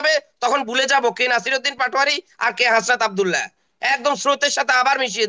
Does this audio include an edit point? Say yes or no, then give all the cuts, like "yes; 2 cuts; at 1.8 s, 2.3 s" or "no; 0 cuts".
no; 0 cuts